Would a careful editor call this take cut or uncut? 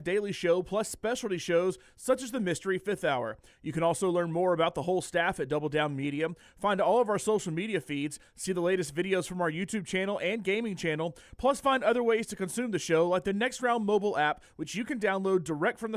uncut